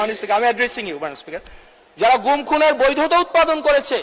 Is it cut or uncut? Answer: uncut